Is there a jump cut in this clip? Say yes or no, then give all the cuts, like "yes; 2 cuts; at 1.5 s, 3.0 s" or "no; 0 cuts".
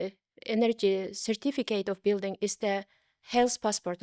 no; 0 cuts